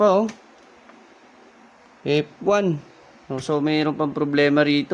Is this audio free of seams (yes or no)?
yes